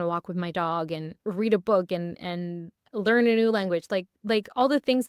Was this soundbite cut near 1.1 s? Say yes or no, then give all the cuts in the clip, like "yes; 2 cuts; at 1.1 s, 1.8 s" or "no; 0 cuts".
yes; 1 cut; at 1.1 s